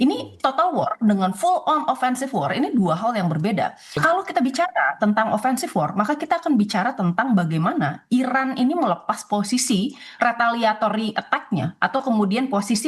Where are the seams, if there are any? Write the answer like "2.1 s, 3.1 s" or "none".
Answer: 3.9 s